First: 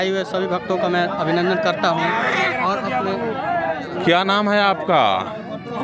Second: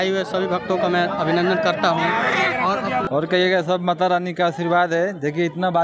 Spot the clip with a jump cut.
second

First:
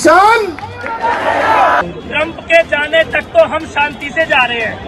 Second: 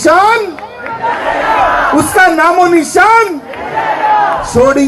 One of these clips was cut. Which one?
first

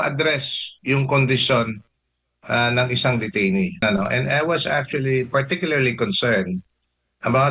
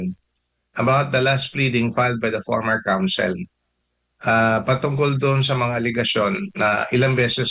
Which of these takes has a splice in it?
first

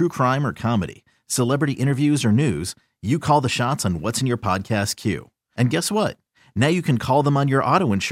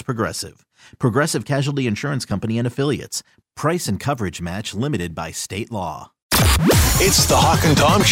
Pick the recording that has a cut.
second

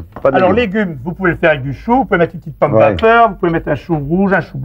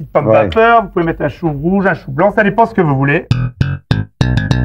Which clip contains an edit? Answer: second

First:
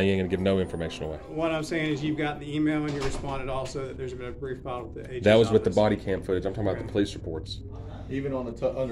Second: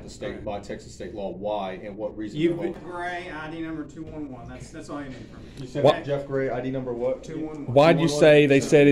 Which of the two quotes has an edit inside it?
second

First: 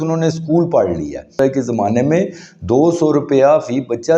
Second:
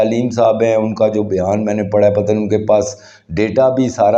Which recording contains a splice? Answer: first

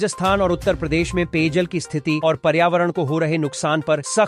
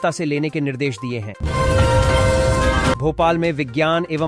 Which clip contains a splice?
second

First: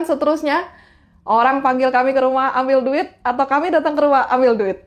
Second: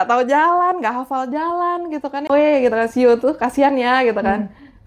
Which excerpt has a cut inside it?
second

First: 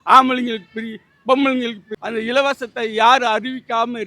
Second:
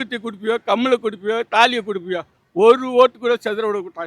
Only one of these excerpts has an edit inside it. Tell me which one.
first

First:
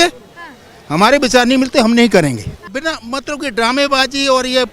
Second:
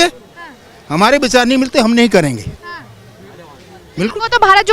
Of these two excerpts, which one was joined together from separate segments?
first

